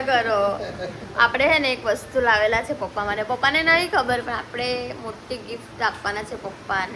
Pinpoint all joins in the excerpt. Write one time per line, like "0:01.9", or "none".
none